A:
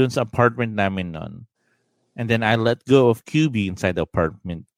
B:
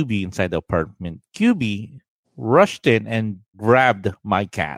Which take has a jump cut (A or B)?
B